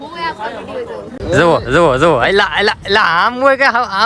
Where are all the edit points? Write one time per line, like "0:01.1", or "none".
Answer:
0:01.2